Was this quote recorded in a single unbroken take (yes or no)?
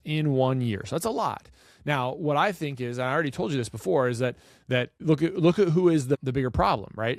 no